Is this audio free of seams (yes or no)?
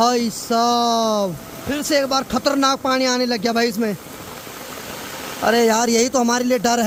yes